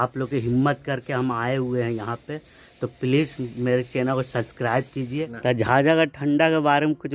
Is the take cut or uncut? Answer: cut